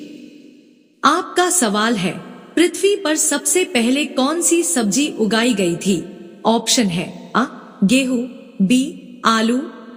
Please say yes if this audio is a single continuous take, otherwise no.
yes